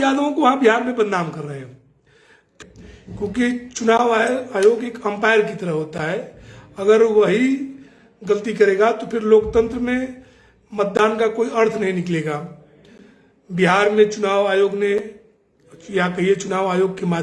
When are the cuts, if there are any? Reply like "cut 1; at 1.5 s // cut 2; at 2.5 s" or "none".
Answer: cut 1; at 2.5 s